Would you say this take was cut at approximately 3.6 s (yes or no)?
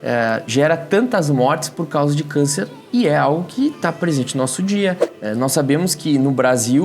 no